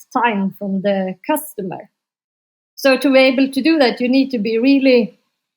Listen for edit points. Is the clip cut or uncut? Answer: uncut